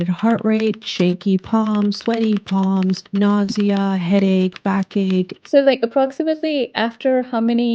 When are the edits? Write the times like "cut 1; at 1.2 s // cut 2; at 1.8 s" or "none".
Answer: cut 1; at 3.0 s // cut 2; at 5.4 s